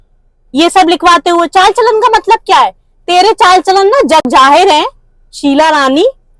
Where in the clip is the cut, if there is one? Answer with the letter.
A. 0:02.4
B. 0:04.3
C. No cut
C